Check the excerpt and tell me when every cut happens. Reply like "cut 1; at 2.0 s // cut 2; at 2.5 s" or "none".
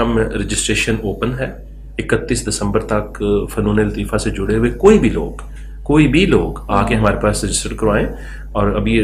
none